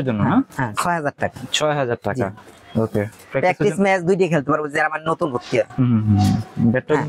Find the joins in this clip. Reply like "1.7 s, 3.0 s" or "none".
none